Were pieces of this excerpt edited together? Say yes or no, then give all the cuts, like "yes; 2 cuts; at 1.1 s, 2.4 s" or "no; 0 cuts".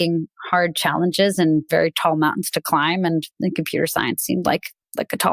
no; 0 cuts